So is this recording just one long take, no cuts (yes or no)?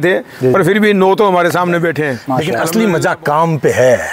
no